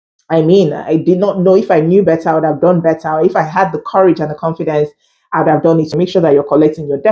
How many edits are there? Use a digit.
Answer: 1